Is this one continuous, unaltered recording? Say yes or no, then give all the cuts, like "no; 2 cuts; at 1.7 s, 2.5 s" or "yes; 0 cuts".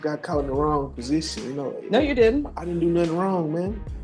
yes; 0 cuts